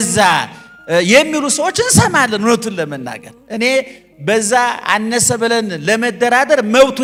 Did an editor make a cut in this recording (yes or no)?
no